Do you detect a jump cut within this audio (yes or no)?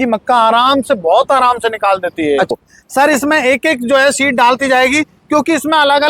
yes